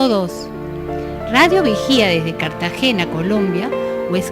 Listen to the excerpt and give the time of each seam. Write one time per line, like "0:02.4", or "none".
none